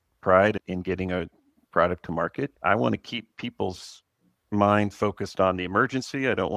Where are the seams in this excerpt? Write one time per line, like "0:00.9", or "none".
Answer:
0:02.5